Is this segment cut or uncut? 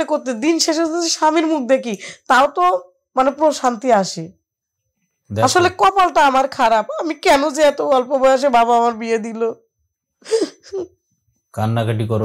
uncut